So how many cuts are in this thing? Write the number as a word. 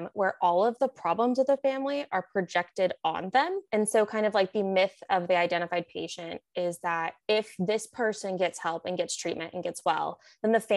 one